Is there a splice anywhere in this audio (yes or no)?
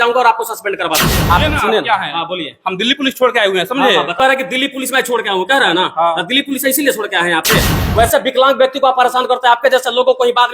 yes